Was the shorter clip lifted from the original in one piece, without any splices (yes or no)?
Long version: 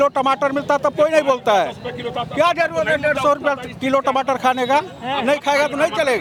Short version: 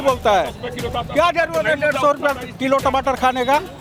yes